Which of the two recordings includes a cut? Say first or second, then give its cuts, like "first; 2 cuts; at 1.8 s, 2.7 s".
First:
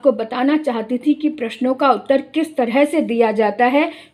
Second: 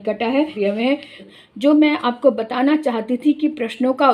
second; 1 cut; at 0.9 s